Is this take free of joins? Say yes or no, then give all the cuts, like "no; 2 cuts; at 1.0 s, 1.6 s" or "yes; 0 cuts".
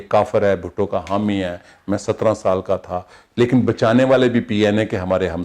yes; 0 cuts